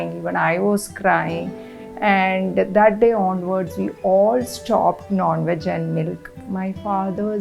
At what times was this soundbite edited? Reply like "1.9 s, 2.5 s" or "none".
6.3 s